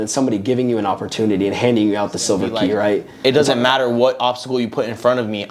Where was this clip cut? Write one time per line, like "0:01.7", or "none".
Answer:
0:03.1